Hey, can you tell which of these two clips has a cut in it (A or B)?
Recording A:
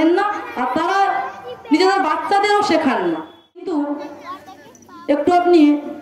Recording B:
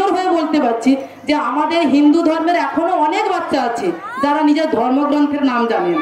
A